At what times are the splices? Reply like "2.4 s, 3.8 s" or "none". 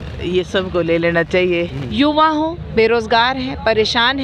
1.8 s